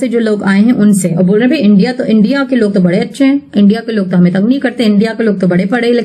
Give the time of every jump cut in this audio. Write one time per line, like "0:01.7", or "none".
none